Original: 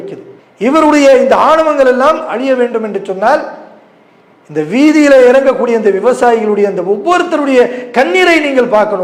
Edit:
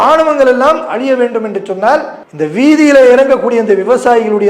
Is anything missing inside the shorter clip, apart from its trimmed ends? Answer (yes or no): yes